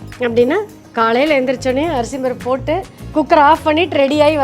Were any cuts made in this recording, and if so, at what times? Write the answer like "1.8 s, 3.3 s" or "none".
3.0 s